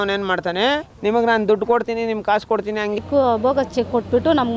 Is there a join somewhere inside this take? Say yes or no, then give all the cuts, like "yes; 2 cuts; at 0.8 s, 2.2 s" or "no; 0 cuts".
yes; 2 cuts; at 0.9 s, 3.0 s